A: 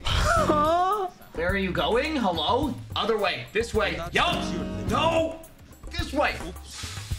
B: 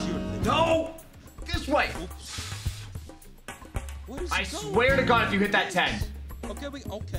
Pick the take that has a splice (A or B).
A